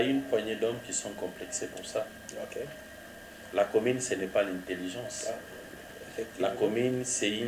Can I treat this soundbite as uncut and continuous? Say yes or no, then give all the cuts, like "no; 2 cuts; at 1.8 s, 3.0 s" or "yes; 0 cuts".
yes; 0 cuts